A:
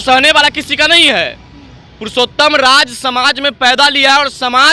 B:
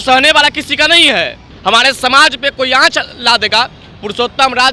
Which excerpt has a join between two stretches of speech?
B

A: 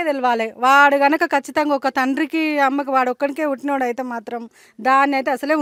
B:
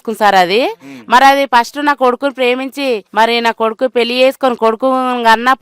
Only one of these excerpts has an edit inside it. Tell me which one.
B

